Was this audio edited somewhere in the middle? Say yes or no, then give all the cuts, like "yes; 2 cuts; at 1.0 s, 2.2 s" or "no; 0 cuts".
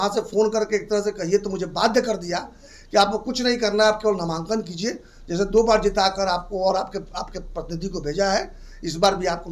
no; 0 cuts